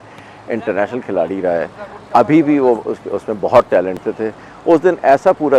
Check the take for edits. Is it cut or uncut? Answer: cut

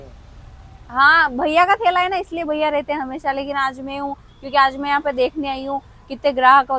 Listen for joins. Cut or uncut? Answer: uncut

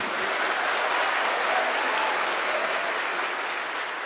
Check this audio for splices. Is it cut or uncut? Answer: uncut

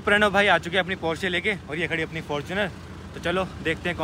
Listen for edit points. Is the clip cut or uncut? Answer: uncut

